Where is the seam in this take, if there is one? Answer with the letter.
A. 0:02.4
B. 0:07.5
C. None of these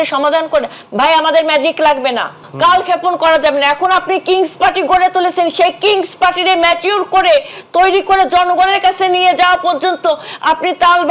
A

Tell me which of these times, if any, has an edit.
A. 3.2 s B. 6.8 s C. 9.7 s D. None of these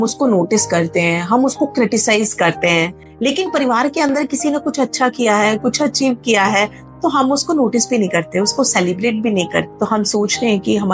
C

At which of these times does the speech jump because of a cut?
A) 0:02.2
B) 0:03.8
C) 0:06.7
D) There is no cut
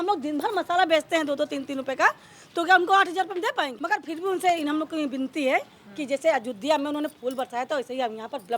B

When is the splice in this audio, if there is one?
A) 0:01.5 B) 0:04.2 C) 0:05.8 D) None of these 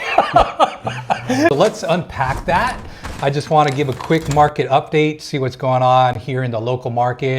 A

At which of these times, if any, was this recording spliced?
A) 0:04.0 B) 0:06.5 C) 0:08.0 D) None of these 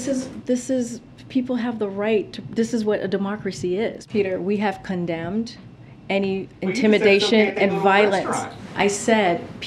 A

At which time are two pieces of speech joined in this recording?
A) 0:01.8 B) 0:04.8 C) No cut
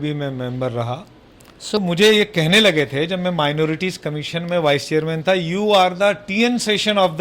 A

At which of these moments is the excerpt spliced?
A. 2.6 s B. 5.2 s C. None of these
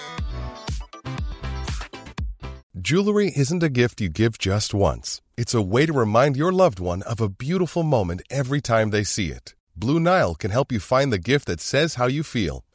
A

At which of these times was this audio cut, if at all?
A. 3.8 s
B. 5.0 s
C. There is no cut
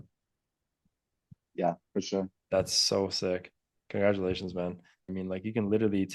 B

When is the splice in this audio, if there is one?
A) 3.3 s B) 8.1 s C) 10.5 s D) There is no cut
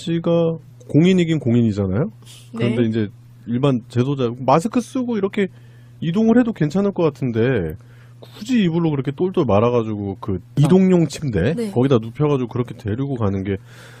A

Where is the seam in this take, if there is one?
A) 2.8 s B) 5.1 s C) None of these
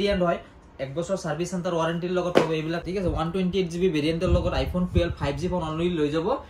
A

